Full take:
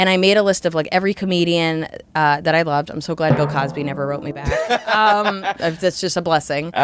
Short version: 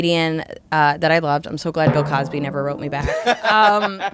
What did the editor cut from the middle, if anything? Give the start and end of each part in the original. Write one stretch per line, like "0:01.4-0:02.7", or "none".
none